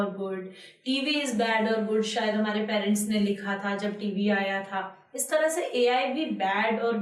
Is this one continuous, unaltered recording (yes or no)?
yes